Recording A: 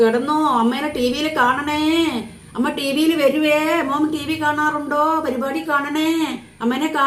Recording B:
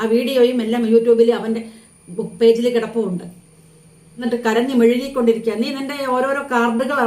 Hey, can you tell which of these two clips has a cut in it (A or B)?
B